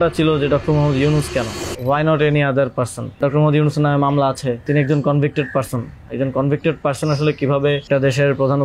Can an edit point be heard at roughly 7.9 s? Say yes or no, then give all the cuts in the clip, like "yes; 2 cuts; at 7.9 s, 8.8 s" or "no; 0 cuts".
yes; 4 cuts; at 1.6 s, 3.2 s, 4.6 s, 7.9 s